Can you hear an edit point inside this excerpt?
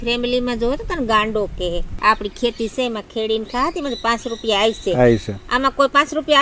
yes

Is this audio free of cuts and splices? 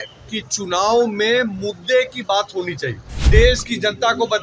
no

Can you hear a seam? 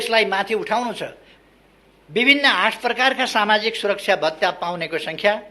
yes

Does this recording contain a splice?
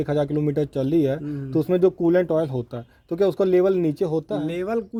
no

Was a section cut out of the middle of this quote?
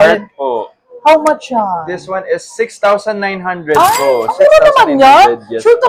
no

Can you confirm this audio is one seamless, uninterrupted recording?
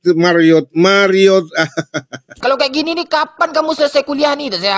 yes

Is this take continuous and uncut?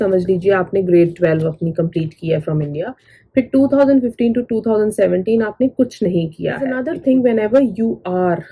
no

